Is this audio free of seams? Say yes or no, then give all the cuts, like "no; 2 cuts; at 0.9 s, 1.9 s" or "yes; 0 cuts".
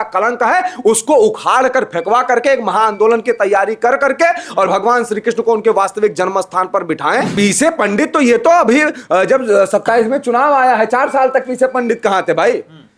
no; 1 cut; at 7.3 s